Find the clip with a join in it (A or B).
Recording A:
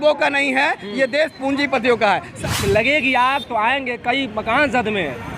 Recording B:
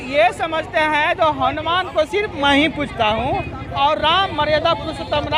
A